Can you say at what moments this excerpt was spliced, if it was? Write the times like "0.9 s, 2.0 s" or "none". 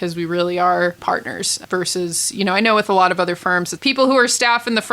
1.0 s, 3.7 s